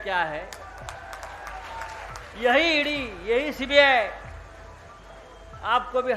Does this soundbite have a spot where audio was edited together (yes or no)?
yes